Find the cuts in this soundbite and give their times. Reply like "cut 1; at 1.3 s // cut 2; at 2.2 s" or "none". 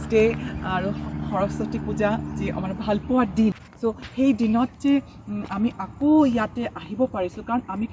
cut 1; at 3.7 s